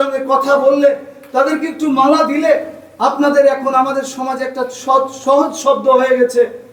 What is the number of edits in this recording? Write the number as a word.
zero